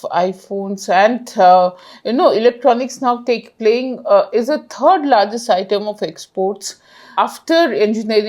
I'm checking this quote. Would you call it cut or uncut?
cut